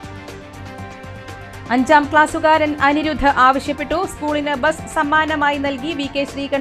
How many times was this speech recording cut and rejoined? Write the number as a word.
one